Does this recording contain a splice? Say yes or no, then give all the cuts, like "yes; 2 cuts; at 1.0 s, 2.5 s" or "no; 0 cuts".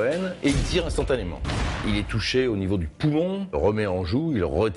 yes; 1 cut; at 3.5 s